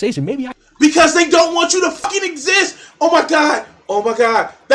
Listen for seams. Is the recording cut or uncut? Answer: cut